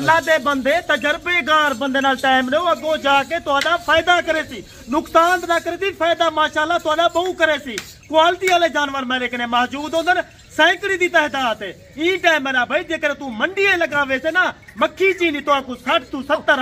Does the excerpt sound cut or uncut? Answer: uncut